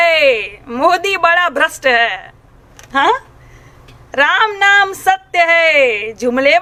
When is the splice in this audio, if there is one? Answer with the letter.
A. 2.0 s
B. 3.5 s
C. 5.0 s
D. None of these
D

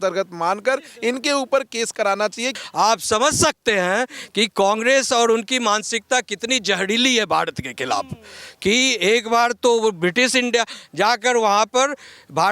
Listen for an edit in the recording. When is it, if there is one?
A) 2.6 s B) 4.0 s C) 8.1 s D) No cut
A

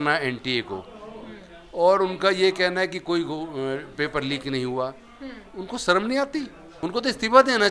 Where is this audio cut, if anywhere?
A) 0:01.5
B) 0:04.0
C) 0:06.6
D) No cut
C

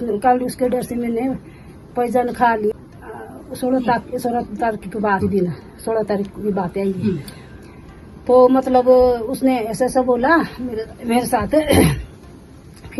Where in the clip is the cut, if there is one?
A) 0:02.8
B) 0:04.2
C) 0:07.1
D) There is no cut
D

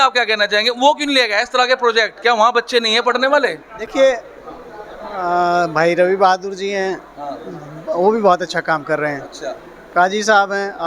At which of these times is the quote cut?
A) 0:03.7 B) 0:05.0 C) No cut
C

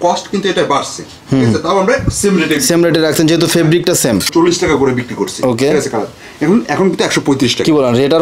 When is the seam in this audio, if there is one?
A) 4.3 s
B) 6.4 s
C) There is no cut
A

